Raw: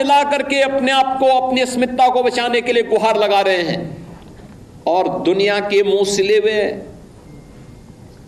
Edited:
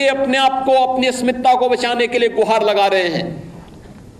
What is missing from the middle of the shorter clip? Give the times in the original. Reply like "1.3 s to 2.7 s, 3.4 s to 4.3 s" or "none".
none

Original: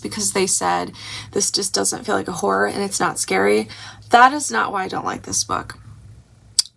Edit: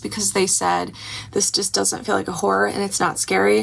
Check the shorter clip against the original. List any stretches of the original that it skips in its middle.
none

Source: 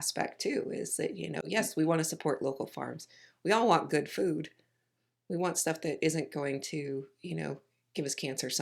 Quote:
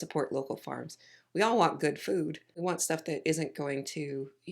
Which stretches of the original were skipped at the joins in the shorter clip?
4.6 s to 5.2 s

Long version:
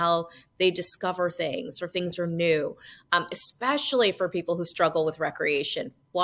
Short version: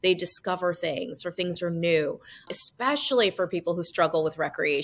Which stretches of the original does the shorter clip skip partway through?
3.0 s to 3.3 s

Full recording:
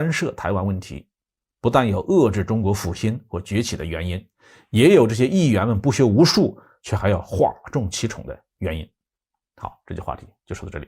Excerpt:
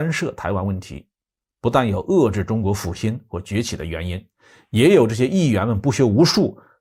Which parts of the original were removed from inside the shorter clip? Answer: none

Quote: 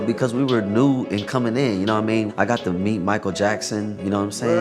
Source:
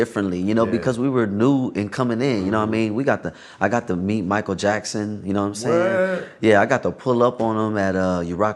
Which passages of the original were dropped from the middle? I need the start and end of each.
2.9 s to 3.5 s

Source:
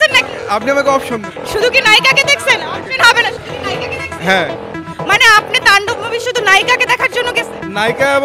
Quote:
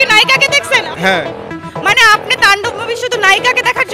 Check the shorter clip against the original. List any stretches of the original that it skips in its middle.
2.7 s to 4.2 s

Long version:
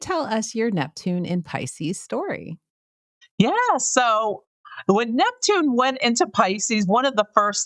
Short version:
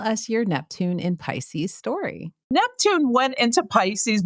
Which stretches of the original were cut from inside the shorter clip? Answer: 2.7 s to 5.1 s

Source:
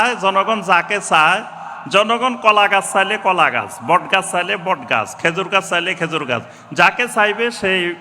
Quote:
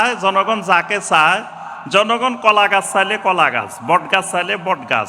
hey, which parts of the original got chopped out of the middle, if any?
none

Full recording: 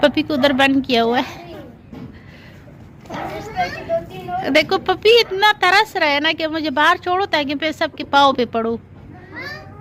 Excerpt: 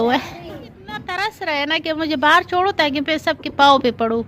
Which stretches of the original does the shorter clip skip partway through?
2.2 s to 5.7 s

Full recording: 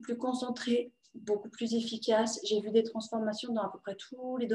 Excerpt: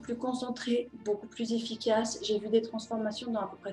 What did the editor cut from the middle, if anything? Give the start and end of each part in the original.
0.9 s to 1.2 s

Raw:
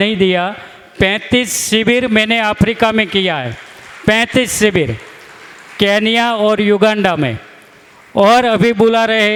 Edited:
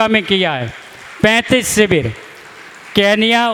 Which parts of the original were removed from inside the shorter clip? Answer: none

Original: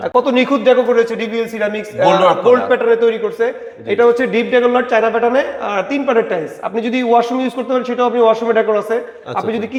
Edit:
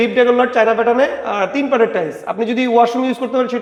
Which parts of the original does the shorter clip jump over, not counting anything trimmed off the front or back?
none

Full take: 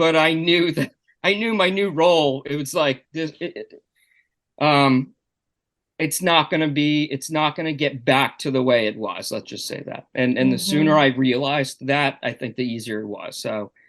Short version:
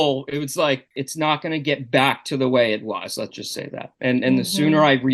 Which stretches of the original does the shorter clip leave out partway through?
3.1 s to 7.1 s

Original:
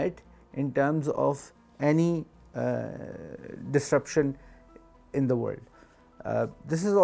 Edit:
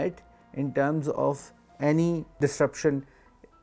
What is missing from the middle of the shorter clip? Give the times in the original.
2.3 s to 3.6 s

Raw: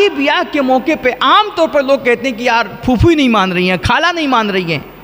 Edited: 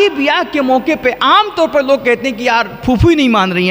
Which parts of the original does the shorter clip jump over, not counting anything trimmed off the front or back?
none

